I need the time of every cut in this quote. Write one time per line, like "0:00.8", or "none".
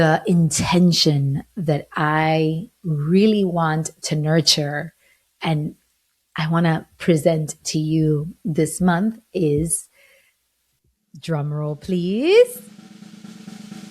0:12.7